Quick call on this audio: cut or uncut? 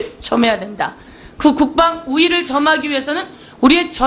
uncut